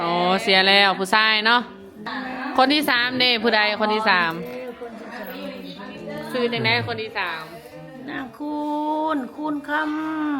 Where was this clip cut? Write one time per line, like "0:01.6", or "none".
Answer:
0:02.0